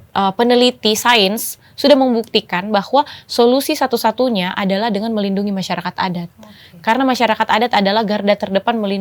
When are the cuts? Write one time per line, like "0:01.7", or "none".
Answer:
none

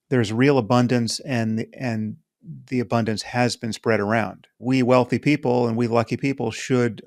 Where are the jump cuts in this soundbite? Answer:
0:04.6

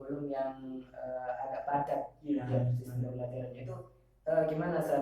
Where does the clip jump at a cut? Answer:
none

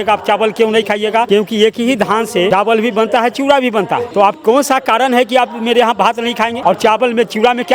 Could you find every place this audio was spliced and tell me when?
0:01.3
0:02.5
0:04.1
0:06.6

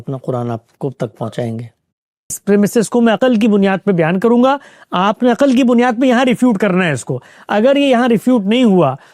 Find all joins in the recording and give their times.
0:02.4

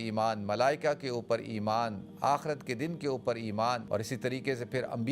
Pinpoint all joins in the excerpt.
0:03.8

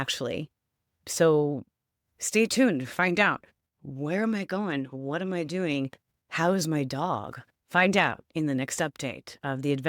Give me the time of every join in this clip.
none

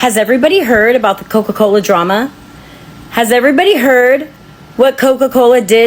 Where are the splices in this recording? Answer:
none

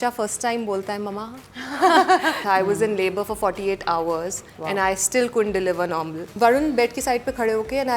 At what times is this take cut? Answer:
0:02.4
0:06.3

